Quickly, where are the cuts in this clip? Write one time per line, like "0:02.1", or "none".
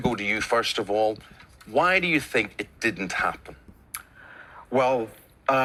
none